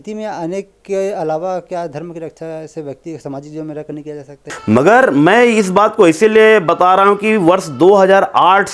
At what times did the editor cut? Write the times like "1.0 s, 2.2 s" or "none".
4.5 s